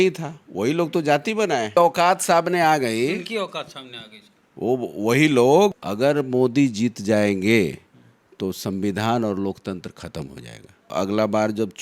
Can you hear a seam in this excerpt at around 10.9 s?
yes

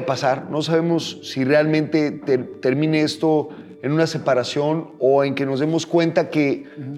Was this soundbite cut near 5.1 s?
no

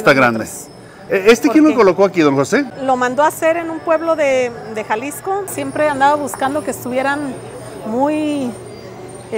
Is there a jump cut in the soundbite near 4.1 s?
no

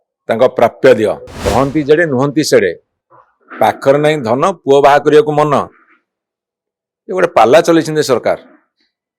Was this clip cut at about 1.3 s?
yes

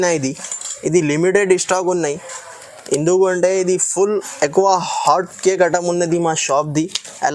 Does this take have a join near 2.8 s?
no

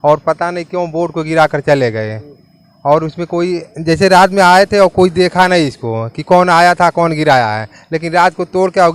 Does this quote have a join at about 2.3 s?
no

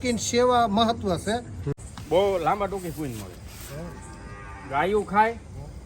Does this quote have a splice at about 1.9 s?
yes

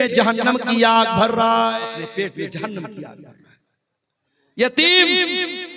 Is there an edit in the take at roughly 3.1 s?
no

